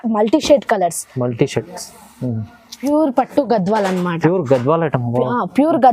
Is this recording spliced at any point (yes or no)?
yes